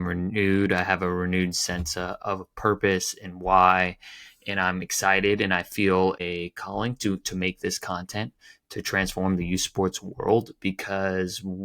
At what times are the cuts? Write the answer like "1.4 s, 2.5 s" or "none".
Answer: 2.2 s, 6.2 s